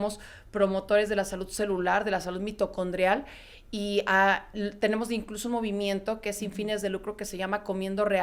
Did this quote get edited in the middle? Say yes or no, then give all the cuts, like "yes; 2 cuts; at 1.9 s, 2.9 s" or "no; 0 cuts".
no; 0 cuts